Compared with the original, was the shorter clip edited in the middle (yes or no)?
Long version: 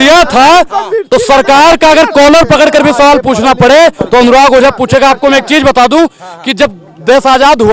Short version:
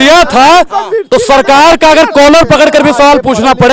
no